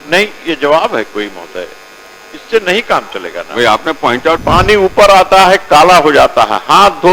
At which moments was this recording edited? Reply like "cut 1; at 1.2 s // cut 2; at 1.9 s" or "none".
cut 1; at 4.4 s